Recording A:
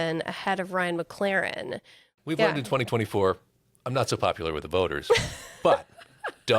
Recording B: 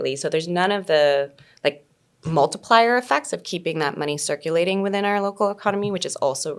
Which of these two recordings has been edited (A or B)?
A